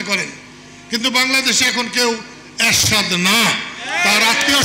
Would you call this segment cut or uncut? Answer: uncut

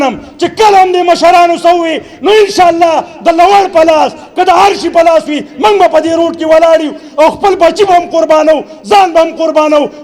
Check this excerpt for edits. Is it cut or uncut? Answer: uncut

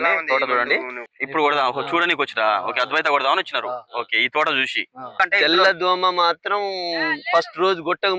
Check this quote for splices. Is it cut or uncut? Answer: cut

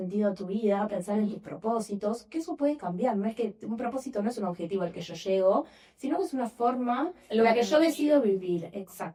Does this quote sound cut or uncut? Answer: uncut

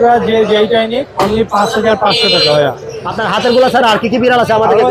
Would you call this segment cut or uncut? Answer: cut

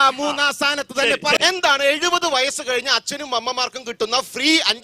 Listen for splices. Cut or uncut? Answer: cut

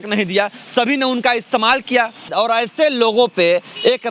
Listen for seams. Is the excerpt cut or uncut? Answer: cut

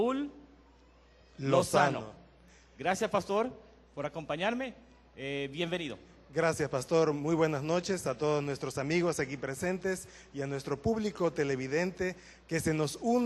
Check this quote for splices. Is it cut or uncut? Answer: cut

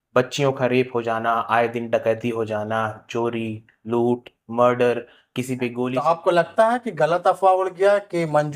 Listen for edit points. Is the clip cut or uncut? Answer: cut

